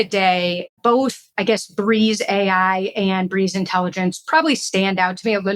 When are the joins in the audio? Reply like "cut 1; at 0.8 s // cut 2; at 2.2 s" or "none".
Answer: cut 1; at 1.3 s